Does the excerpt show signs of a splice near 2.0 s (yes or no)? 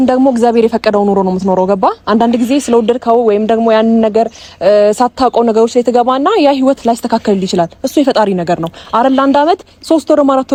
no